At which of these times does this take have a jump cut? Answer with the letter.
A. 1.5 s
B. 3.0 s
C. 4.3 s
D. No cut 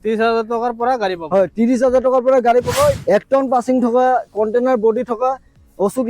B